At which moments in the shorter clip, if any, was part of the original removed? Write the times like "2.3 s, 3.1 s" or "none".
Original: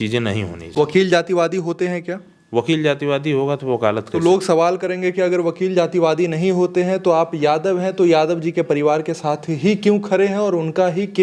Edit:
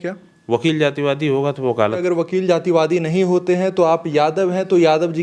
2.0 s